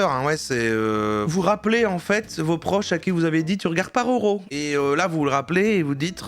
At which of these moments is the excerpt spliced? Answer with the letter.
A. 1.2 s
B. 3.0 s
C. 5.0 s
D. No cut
A